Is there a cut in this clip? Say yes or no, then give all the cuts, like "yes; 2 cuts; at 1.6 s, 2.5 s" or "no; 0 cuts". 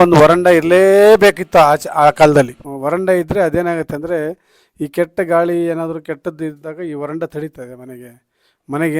yes; 1 cut; at 2.7 s